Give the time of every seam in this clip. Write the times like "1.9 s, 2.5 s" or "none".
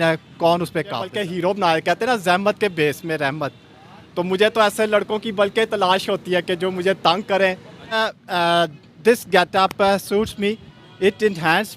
1.1 s, 8.0 s

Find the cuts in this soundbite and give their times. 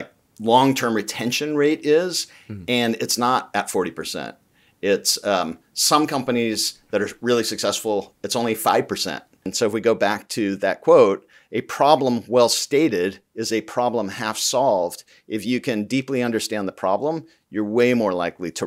9.5 s

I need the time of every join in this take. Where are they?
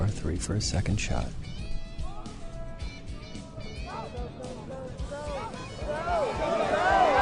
1.7 s

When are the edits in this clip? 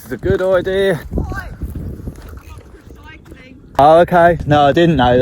1.1 s, 3.8 s, 4.4 s

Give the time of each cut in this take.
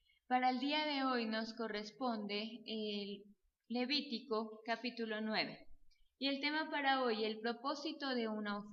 none

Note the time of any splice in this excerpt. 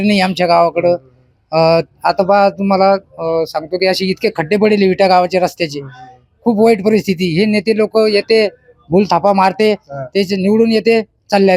none

